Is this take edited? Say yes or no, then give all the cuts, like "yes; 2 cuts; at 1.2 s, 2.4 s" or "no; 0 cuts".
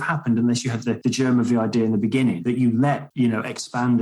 yes; 2 cuts; at 1.0 s, 2.8 s